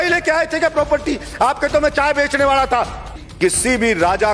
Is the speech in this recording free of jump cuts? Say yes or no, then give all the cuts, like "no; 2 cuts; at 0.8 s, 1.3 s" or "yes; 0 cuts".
no; 1 cut; at 3.2 s